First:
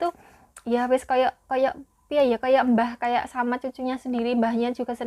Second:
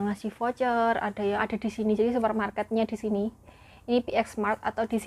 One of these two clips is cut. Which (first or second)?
second